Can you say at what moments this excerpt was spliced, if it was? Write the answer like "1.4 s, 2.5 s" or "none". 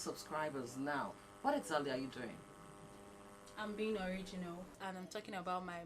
4.8 s